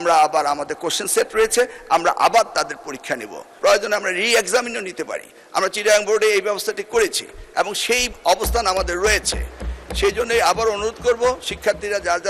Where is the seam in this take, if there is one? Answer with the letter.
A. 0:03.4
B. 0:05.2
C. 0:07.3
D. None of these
A